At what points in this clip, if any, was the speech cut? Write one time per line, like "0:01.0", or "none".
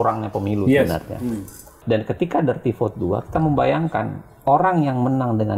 0:01.8